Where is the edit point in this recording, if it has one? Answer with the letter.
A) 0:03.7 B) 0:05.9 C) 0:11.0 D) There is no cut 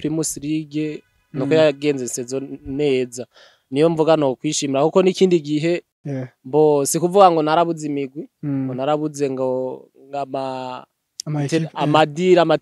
B